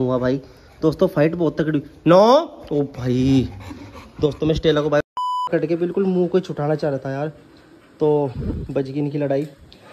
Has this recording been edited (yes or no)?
yes